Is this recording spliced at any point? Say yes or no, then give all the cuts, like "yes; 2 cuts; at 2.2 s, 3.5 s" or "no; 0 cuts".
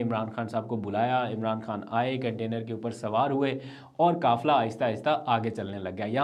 no; 0 cuts